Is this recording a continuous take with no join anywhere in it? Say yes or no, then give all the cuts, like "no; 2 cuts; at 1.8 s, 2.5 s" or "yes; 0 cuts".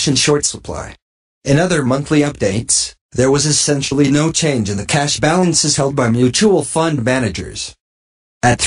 no; 1 cut; at 4.9 s